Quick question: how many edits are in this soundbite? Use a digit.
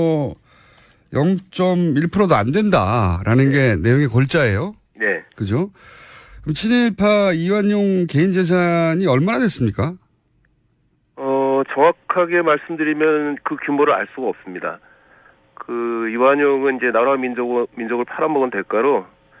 1